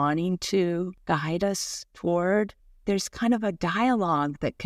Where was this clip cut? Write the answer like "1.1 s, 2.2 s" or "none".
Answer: 1.0 s, 2.7 s

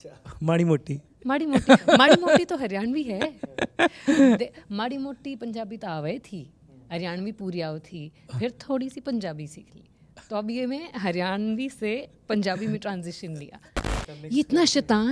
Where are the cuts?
13.8 s

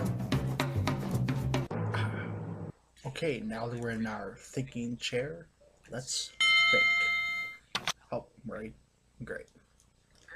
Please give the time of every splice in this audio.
6.2 s

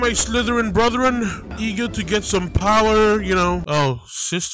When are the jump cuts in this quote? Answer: none

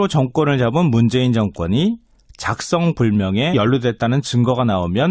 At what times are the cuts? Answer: none

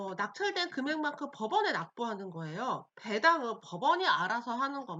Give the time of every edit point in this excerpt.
2.9 s

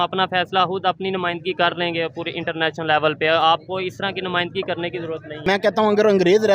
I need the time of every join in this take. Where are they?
5.4 s

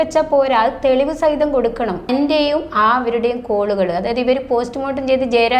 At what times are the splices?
2.1 s

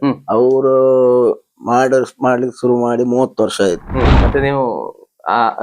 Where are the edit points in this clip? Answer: 4.1 s

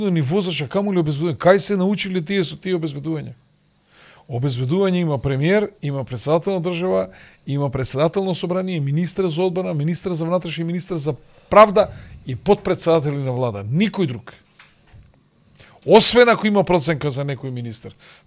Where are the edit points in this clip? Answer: none

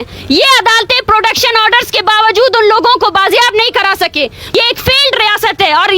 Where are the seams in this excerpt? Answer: 4.6 s

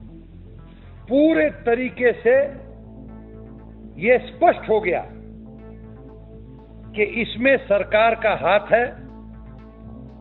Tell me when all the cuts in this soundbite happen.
1.0 s, 5.1 s, 6.5 s, 9.0 s

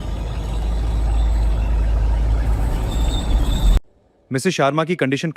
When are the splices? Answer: 3.8 s

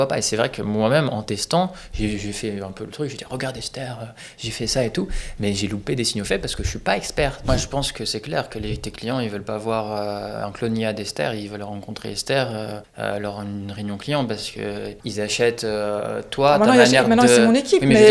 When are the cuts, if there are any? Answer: 7.5 s, 12.8 s, 15.0 s

